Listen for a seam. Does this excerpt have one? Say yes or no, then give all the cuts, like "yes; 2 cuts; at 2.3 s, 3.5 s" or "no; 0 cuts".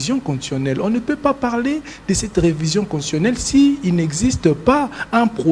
no; 0 cuts